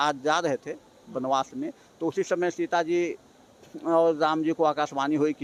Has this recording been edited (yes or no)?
no